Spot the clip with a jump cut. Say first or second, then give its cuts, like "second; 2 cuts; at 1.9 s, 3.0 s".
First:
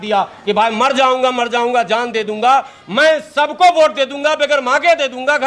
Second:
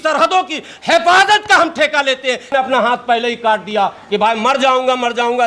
second; 1 cut; at 2.5 s